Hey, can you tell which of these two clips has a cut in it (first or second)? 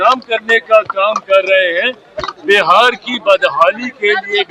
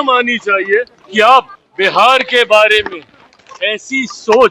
second